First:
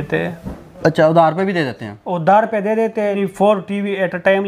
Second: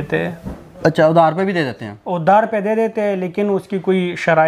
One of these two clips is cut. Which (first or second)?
first